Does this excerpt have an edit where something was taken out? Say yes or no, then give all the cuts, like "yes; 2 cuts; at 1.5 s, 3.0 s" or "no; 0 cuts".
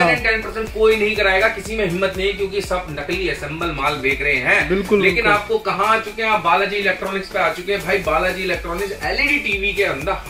no; 0 cuts